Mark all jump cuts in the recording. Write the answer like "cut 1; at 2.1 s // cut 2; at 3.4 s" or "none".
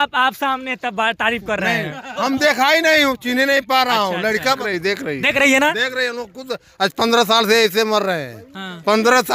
cut 1; at 4.6 s